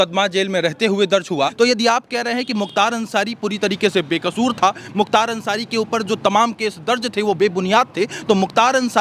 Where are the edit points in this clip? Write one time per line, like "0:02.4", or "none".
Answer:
0:01.5